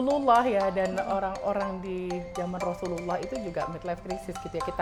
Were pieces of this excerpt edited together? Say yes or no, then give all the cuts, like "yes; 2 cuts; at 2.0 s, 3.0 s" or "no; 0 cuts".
no; 0 cuts